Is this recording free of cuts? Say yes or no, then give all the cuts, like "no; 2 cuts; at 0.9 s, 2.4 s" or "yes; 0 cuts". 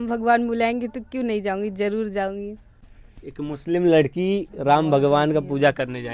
yes; 0 cuts